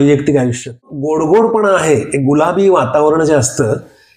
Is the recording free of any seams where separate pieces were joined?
no; 1 cut; at 1.0 s

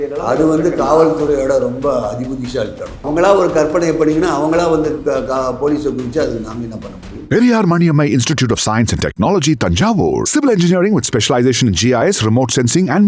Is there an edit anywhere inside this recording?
yes; 2 cuts; at 3.0 s, 7.1 s

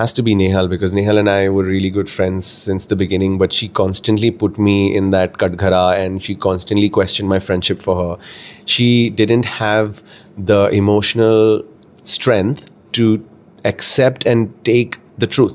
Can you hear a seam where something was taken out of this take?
no; 0 cuts

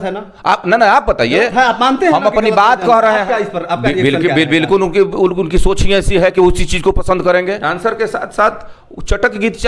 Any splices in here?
yes; 2 cuts; at 3.2 s, 7.6 s

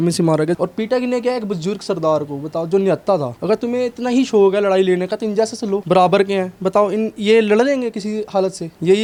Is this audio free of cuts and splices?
yes; 0 cuts

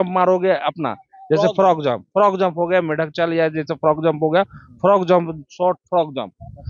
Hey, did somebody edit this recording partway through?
no; 0 cuts

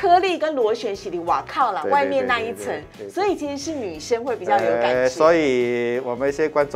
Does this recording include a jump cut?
no; 0 cuts

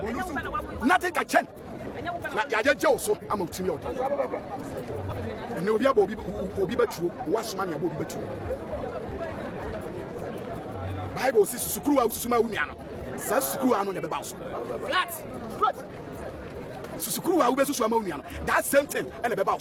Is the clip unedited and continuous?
yes; 0 cuts

